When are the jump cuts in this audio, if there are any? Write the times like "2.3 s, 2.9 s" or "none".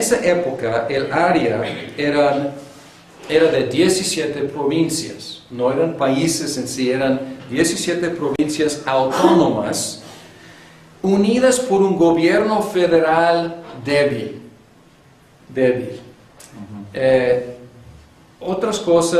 none